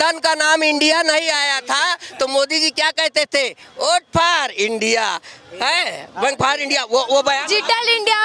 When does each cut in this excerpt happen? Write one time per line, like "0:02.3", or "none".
none